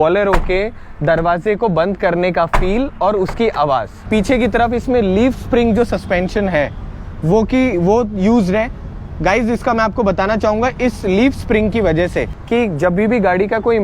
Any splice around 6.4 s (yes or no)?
no